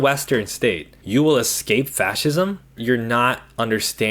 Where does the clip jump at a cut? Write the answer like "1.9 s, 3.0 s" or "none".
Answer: 2.8 s

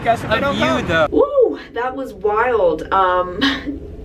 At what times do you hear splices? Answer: 1.1 s

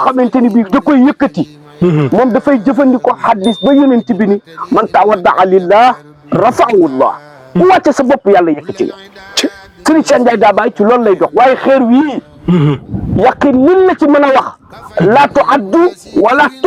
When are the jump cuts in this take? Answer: none

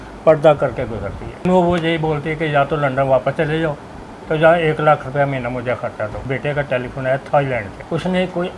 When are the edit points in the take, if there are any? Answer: 1.5 s, 6.2 s, 7.8 s

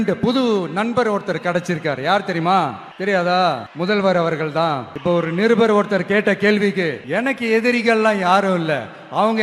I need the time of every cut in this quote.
2.9 s, 3.7 s, 4.9 s, 7.0 s

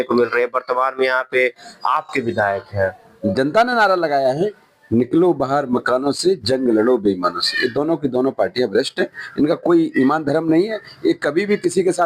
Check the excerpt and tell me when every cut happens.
3.1 s

